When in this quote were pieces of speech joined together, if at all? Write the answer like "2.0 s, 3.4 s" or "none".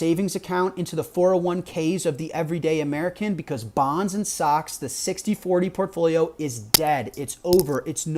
none